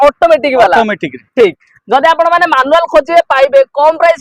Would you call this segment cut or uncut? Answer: uncut